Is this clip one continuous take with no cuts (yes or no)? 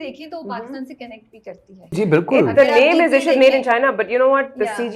no